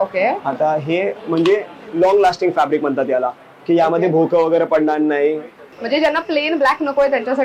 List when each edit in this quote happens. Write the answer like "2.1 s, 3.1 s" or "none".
5.7 s